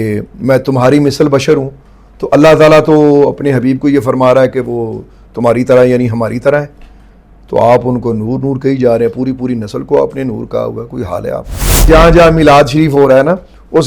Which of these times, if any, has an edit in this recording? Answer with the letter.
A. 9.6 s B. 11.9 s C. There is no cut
B